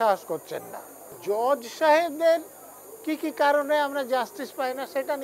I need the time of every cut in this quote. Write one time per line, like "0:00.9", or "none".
0:01.1